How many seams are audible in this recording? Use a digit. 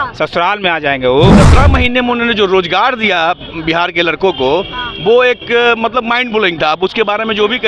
1